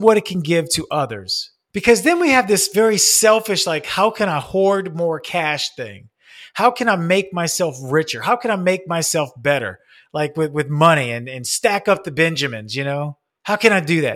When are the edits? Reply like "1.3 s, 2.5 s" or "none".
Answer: 13.2 s